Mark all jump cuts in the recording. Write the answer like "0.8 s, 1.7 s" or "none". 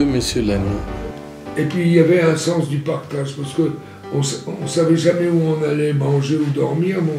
1.4 s